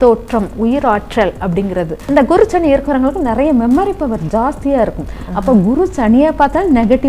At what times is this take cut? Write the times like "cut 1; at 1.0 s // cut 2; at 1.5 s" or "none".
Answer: cut 1; at 2.0 s